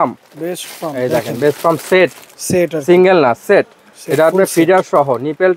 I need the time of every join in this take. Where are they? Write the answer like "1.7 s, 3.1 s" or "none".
none